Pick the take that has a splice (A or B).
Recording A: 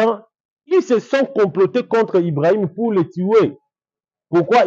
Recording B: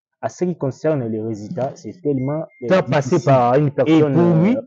B